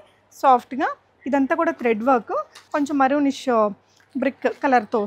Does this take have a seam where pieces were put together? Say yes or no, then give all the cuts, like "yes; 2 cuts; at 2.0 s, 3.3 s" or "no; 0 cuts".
yes; 1 cut; at 2.6 s